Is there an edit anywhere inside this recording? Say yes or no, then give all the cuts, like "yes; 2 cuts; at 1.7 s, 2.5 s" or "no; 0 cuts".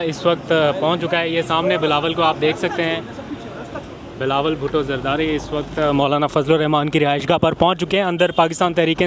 no; 0 cuts